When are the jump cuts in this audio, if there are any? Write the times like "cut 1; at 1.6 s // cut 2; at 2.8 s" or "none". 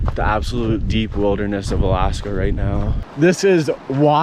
cut 1; at 2.9 s